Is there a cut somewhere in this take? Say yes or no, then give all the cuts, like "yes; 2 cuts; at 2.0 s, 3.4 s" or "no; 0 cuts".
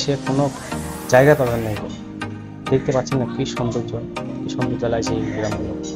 no; 0 cuts